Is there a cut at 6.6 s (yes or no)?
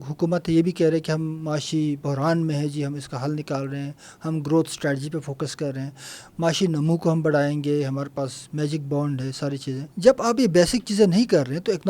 no